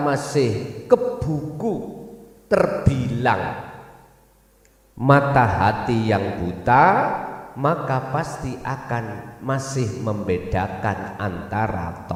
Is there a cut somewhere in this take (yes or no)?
no